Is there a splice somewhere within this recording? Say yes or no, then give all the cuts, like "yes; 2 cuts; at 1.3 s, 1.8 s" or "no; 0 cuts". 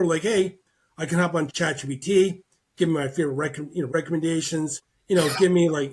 yes; 3 cuts; at 1.5 s, 3.9 s, 4.9 s